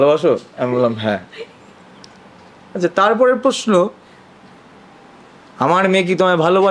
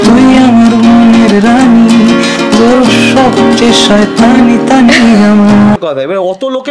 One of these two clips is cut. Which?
second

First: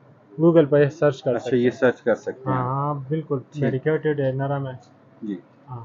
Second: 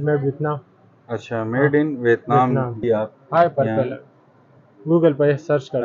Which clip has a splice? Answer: second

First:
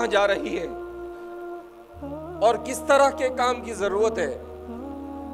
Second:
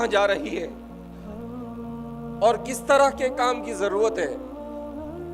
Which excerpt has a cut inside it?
second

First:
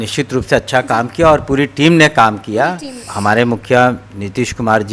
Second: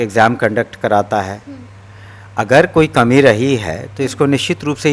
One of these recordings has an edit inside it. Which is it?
first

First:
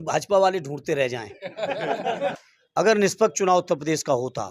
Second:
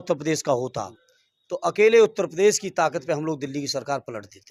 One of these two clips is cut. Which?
first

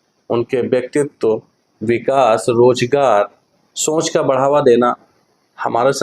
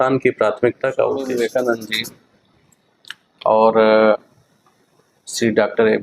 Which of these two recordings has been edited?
second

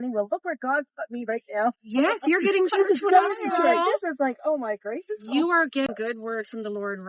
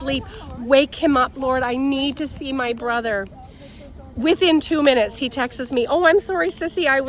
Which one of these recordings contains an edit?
first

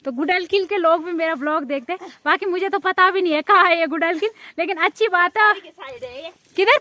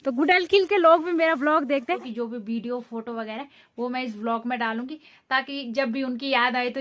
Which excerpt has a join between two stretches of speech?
second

